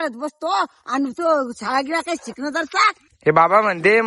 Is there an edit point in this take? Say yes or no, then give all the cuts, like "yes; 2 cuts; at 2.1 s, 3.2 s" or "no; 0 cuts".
yes; 1 cut; at 3.1 s